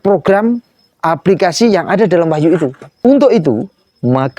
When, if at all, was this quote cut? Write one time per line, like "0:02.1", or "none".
0:03.0